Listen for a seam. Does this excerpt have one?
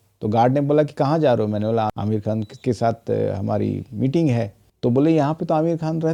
no; 0 cuts

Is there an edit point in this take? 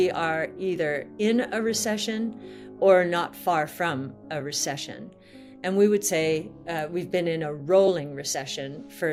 no; 0 cuts

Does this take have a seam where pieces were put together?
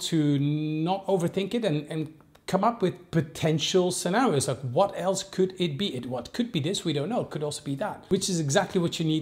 no; 0 cuts

